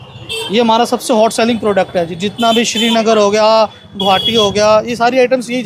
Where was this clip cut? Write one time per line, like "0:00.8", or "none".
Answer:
none